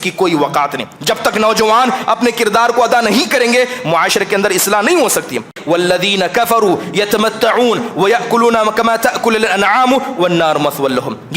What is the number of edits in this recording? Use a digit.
1